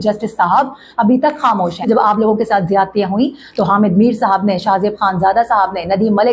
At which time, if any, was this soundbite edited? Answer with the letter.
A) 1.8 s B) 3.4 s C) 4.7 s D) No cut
A